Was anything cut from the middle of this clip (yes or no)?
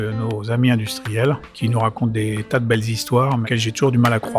yes